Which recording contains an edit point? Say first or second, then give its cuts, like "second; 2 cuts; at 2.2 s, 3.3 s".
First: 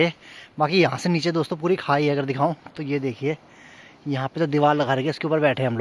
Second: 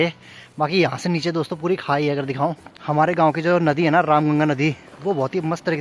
second; 1 cut; at 2.7 s